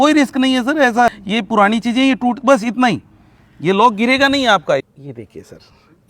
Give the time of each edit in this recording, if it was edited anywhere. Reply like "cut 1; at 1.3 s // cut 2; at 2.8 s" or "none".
cut 1; at 1.2 s // cut 2; at 4.8 s